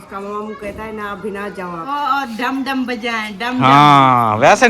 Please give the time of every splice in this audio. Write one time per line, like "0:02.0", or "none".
0:01.8

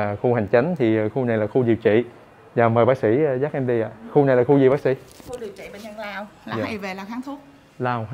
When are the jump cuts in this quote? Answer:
none

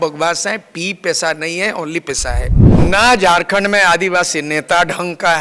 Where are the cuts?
0:02.6

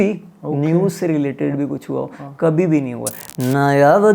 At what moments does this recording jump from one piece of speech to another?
0:03.2

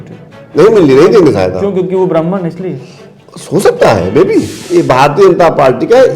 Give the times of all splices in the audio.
0:04.6

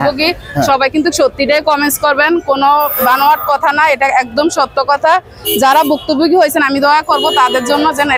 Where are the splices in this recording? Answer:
none

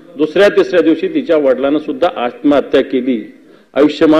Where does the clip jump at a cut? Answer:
none

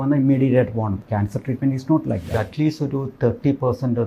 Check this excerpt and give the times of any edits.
0:01.0
0:02.3

